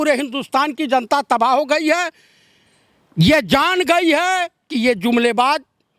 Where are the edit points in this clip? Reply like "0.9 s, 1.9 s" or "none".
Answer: none